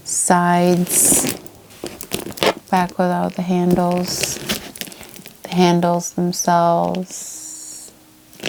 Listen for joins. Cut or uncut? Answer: uncut